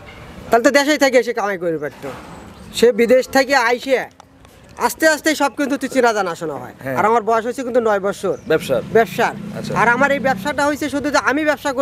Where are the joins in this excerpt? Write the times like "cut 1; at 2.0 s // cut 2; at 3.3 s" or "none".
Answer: none